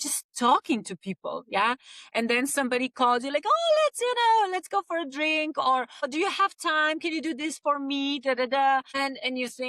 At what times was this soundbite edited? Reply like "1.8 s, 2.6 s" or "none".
6.1 s, 8.9 s